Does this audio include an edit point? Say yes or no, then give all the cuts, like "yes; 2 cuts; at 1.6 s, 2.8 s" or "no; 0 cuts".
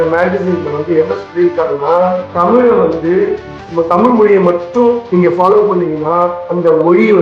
no; 0 cuts